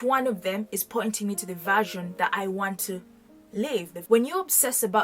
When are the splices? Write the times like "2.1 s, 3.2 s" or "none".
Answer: 3.9 s